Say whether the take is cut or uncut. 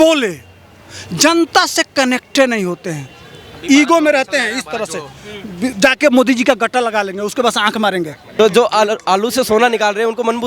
cut